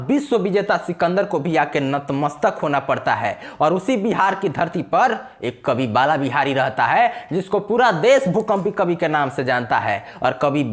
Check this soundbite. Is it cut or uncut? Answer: uncut